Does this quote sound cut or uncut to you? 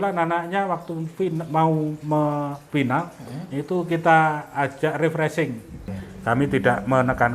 cut